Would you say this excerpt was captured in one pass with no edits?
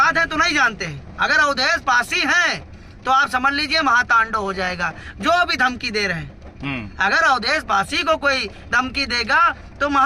yes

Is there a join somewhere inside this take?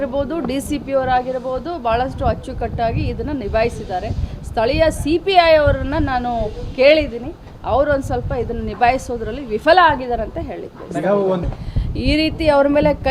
yes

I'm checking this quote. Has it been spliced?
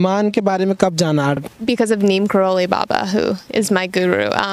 yes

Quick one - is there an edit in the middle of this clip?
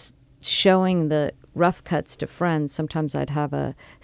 no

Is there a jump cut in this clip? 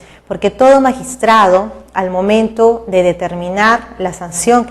yes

